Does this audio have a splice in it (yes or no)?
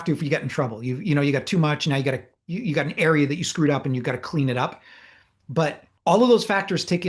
yes